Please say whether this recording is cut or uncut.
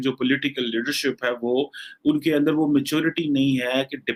uncut